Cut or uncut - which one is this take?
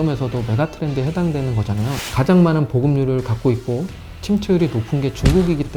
cut